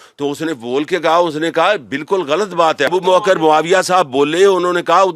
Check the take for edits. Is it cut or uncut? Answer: cut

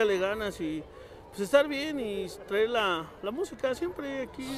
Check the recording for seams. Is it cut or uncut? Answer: uncut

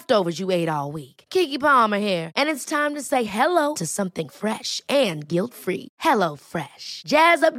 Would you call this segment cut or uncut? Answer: uncut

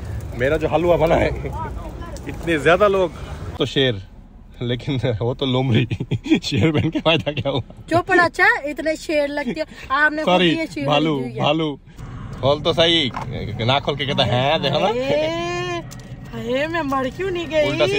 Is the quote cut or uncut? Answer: cut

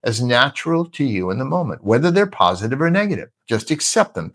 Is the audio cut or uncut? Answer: cut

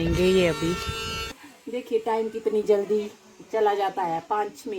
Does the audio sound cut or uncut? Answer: cut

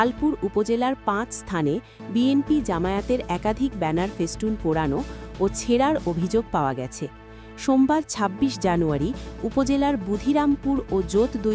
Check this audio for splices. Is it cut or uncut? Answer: uncut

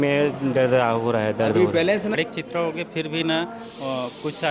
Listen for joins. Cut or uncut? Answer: cut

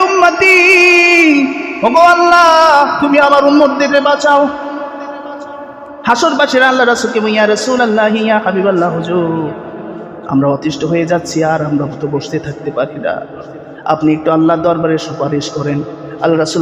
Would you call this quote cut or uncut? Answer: uncut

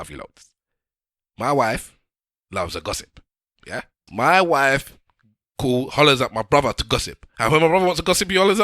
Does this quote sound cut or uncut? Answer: cut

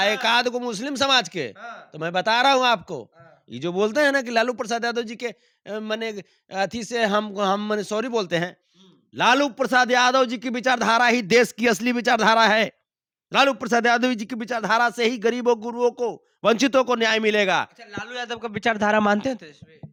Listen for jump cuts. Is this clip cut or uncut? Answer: uncut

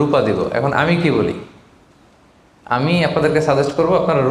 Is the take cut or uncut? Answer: uncut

